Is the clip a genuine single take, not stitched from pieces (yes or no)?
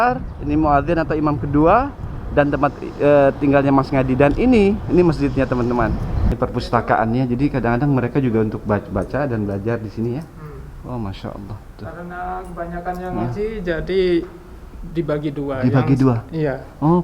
no